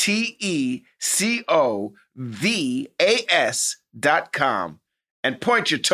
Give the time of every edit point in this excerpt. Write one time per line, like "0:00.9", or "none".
none